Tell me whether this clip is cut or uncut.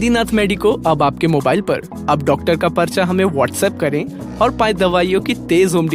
uncut